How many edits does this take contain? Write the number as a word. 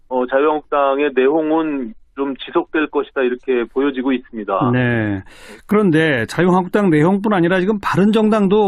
one